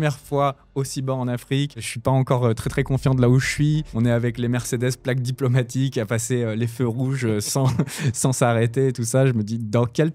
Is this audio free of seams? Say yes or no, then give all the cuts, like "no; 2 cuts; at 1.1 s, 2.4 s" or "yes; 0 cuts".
no; 1 cut; at 1.9 s